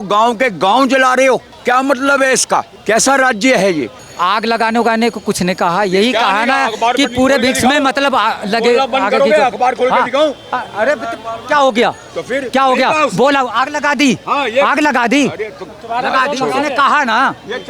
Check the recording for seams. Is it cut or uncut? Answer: cut